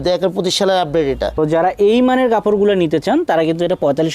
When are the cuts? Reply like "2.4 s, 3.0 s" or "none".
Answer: 1.4 s